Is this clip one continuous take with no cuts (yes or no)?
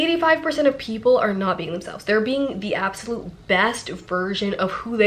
yes